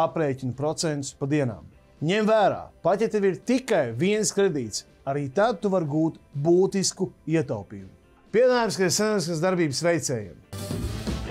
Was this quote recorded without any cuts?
no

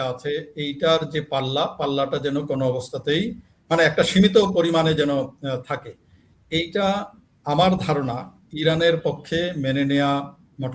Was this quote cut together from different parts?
no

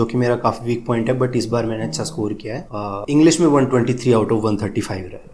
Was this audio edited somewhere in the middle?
no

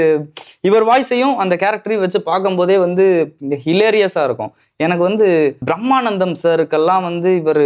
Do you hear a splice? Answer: yes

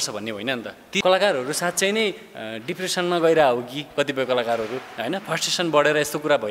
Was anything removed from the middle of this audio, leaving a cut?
yes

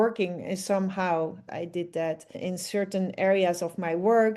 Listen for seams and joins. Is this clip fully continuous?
no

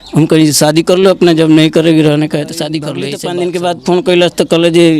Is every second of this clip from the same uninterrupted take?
no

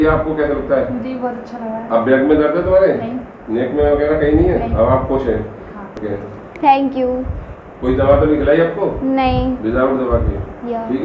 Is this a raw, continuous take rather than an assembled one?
no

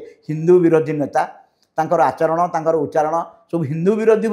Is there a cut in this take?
no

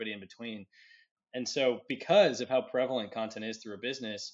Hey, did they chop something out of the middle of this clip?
yes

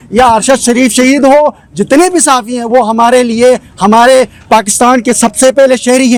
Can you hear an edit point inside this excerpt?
no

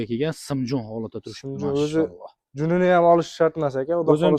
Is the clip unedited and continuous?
yes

